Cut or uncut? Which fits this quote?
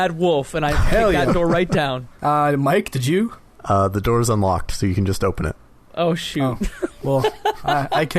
cut